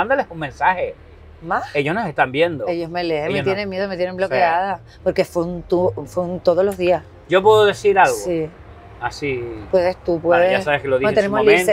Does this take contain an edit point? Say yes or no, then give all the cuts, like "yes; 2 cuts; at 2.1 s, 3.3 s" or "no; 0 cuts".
no; 0 cuts